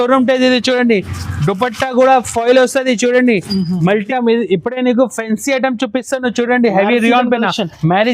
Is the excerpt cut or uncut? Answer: cut